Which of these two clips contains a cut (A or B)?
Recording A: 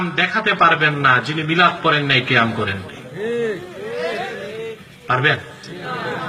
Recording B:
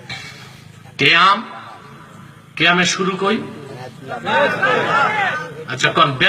B